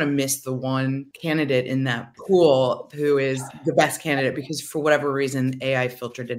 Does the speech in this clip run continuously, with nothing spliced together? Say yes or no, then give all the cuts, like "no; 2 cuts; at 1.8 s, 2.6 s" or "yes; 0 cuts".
no; 3 cuts; at 1.1 s, 2.1 s, 3.5 s